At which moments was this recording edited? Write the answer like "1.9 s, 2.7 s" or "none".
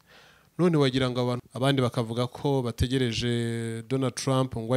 1.4 s